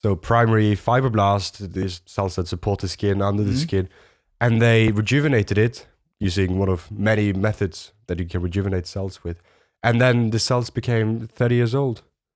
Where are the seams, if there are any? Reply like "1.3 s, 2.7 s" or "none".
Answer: none

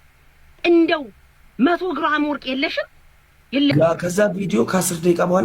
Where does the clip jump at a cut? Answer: 3.7 s

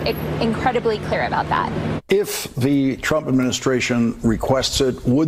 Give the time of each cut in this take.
none

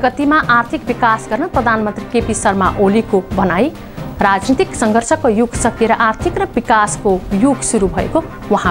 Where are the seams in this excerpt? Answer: none

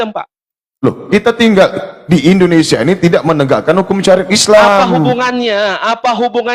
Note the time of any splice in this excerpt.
none

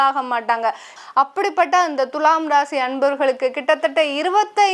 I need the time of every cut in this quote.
0.9 s

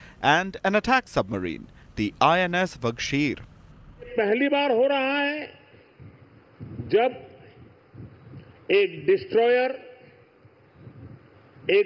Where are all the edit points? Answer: 4.1 s

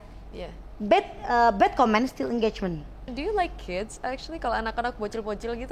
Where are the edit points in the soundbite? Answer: 3.1 s

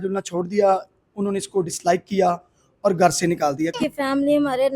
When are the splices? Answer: 3.8 s

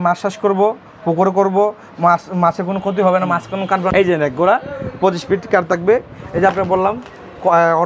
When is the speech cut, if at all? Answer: 3.9 s

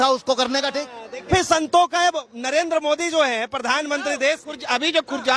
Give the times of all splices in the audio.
1.2 s

